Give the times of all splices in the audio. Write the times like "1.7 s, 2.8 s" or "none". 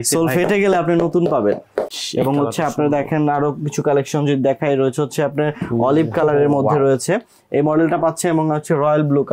2.0 s